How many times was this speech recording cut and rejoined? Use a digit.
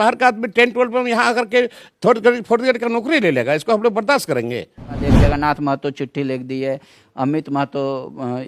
1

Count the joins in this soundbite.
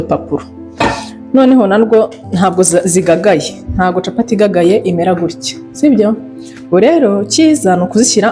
0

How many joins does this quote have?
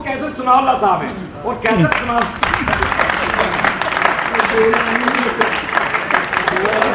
0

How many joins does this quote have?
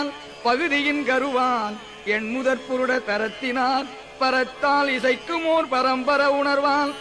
1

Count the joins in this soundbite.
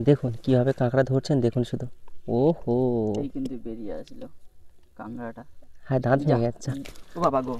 0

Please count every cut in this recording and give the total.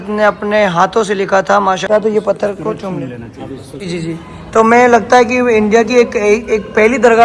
2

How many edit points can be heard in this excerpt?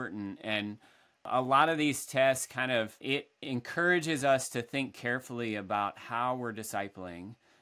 2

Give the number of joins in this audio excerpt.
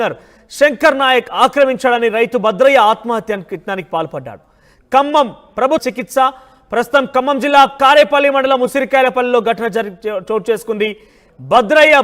1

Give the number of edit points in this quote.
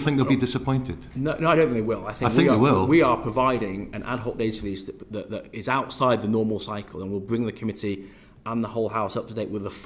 0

